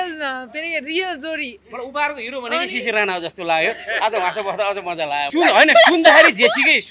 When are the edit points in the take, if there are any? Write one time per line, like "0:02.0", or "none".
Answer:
0:05.3